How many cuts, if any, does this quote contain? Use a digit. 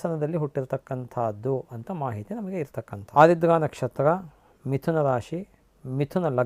1